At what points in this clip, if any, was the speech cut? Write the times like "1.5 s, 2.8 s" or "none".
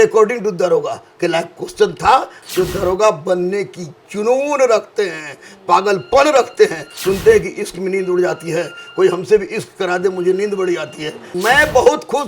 2.4 s, 6.9 s, 11.3 s